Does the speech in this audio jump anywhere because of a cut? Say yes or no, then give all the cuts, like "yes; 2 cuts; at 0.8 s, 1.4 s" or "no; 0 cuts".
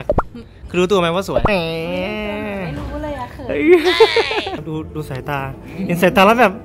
yes; 2 cuts; at 1.4 s, 4.6 s